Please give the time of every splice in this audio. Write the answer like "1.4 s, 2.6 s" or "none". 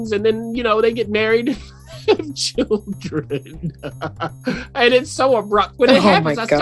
5.7 s